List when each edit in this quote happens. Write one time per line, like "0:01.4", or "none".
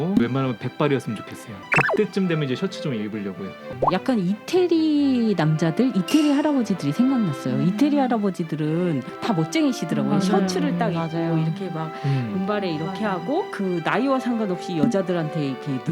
0:01.6
0:03.6